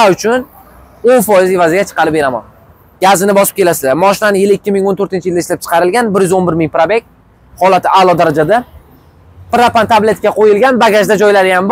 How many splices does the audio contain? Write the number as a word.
zero